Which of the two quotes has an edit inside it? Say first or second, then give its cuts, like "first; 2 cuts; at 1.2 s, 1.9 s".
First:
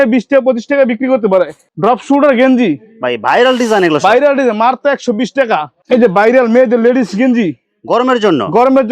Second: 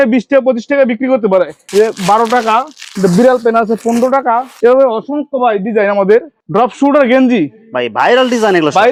first; 2 cuts; at 1.6 s, 5.8 s